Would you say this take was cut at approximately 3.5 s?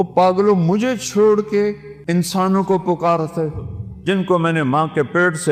no; 1 cut; at 1.9 s

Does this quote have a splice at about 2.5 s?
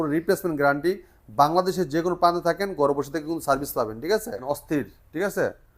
no; 1 cut; at 4.4 s

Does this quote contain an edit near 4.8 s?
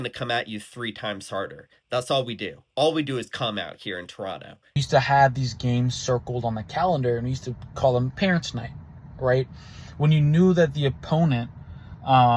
yes; 1 cut; at 4.8 s

